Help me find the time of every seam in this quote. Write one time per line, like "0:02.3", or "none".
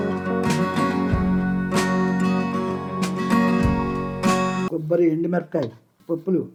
none